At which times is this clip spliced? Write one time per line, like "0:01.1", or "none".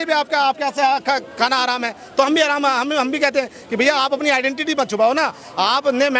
none